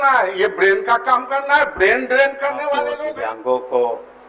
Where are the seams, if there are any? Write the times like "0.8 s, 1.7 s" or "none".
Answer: 3.0 s

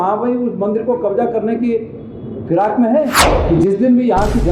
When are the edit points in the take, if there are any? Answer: 3.2 s

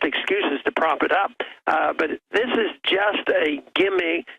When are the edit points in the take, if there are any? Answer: 2.2 s

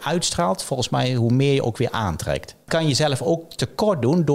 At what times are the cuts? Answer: 2.7 s

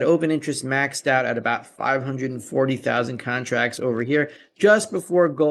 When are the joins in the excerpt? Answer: none

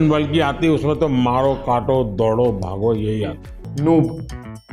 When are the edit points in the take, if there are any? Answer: 3.6 s

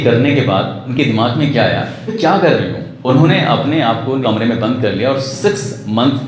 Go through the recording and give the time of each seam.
0.8 s, 2.1 s, 2.8 s, 4.2 s

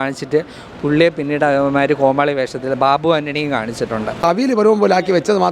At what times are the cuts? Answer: 4.2 s

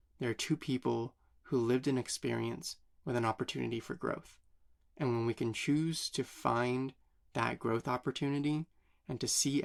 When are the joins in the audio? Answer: none

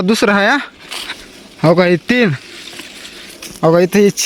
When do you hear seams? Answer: none

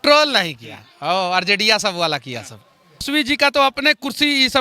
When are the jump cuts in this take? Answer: 3.1 s

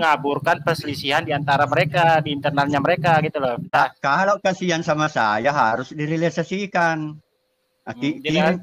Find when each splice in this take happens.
3.7 s

